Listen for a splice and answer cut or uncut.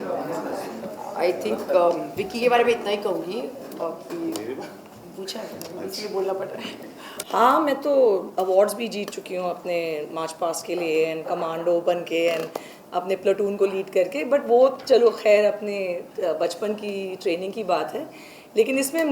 cut